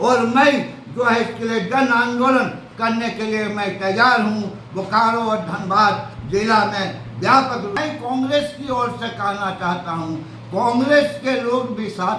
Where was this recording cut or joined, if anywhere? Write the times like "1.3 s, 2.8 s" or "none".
7.8 s